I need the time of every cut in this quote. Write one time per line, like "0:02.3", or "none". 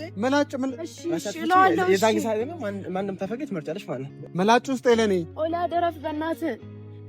0:04.1